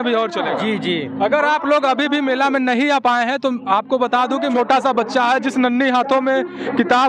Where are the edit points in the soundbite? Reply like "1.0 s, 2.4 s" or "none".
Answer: 4.5 s